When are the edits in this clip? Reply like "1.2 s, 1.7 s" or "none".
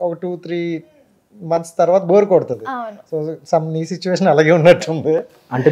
none